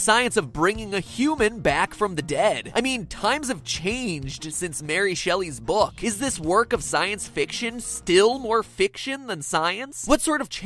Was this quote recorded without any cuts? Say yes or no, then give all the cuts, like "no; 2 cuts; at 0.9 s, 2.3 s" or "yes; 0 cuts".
no; 1 cut; at 1.9 s